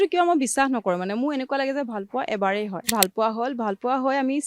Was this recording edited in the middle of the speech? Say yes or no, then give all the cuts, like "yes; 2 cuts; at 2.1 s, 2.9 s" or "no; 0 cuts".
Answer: yes; 1 cut; at 2.9 s